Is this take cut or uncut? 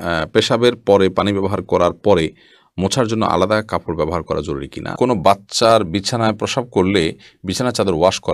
cut